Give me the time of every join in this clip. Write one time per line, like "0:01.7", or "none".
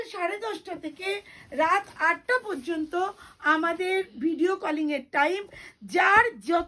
none